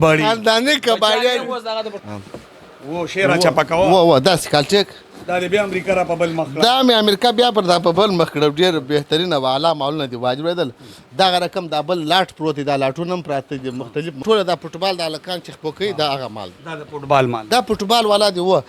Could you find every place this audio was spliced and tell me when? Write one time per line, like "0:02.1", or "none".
0:01.9
0:14.2